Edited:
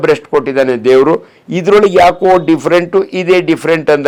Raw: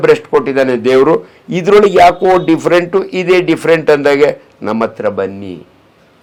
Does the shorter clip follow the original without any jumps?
yes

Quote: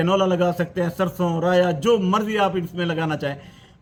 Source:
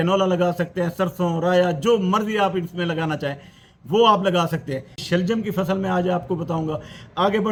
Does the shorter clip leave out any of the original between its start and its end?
no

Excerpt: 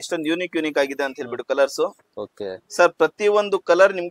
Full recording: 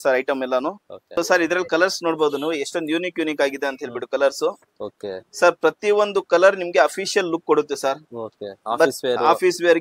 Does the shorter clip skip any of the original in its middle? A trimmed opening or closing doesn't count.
no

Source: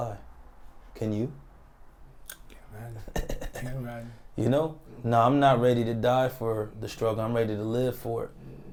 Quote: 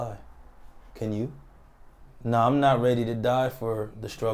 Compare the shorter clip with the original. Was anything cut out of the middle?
yes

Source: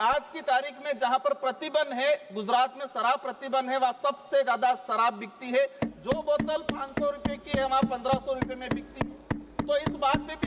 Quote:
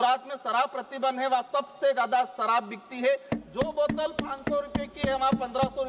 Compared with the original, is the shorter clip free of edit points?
yes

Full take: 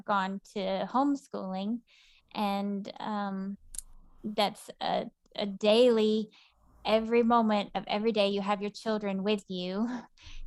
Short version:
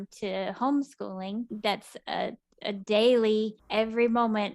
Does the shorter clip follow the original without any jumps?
no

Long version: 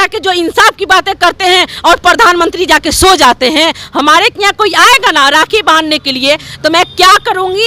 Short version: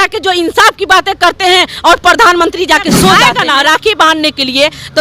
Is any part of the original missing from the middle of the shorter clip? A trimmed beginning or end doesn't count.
yes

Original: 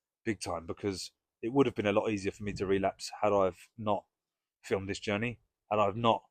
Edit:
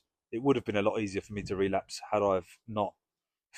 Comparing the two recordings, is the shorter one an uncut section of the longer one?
yes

